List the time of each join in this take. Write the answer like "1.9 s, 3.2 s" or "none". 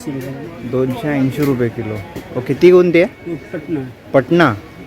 none